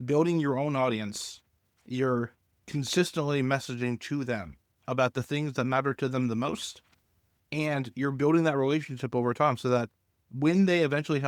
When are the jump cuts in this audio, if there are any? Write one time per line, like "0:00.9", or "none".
none